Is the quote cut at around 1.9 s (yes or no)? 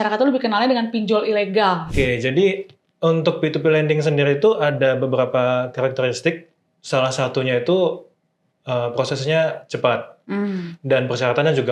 yes